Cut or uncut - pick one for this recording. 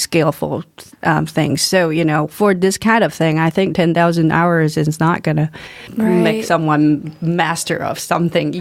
uncut